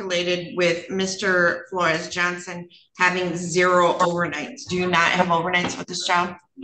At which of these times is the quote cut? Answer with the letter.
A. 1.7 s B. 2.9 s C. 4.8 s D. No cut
D